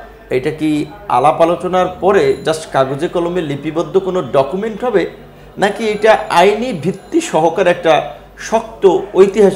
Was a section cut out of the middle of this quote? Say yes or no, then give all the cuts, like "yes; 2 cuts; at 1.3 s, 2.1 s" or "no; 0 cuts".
no; 0 cuts